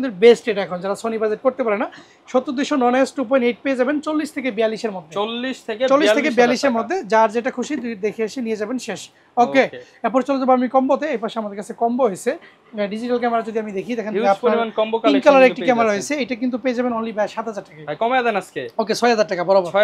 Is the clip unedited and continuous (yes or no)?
yes